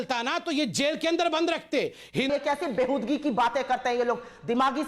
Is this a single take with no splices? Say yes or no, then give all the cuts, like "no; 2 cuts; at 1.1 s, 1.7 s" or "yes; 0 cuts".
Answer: no; 1 cut; at 2.3 s